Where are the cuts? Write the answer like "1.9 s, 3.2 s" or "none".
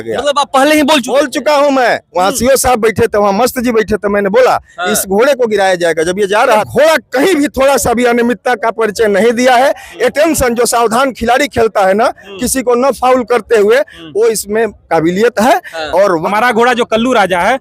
6.7 s, 16.2 s